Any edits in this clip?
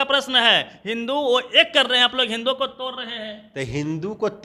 no; 0 cuts

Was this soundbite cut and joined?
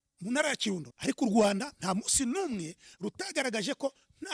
yes; 1 cut; at 0.9 s

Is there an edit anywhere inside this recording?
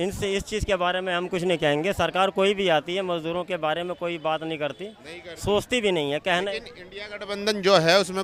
no; 0 cuts

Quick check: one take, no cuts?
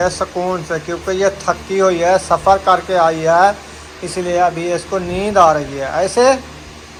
yes; 0 cuts

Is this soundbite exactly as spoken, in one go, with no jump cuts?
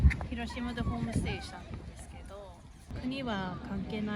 no; 1 cut; at 2.9 s

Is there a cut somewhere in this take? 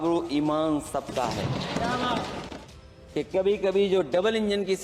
yes; 1 cut; at 2.4 s

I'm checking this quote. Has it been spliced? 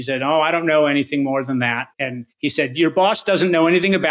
yes; 1 cut; at 1.9 s

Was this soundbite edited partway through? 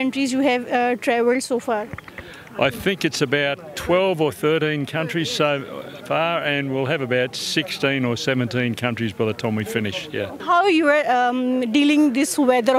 yes; 1 cut; at 10.4 s

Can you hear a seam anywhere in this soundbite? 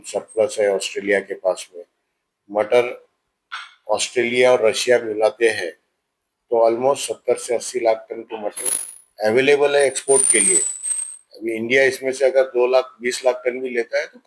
no; 0 cuts

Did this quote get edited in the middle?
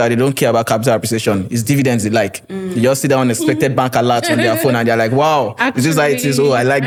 no; 0 cuts

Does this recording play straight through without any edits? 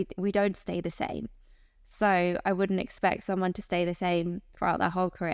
yes; 0 cuts

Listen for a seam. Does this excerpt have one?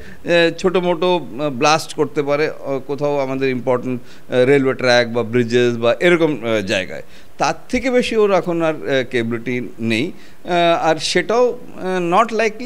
no; 0 cuts

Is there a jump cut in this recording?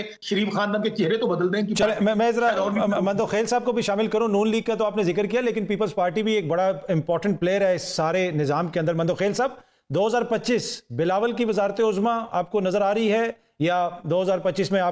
no; 0 cuts

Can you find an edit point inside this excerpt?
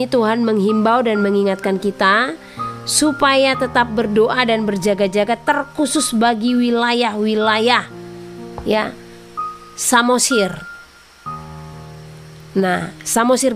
no; 0 cuts

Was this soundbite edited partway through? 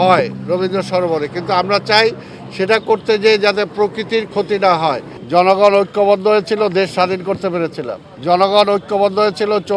yes; 2 cuts; at 5.1 s, 8.0 s

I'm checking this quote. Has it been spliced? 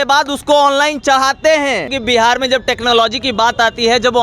yes; 1 cut; at 2.0 s

